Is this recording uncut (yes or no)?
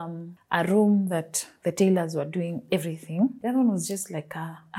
no